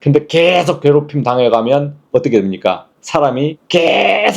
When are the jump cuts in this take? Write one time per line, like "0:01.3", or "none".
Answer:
0:03.3